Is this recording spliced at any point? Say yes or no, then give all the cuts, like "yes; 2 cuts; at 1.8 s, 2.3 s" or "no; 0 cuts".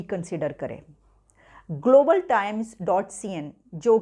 no; 0 cuts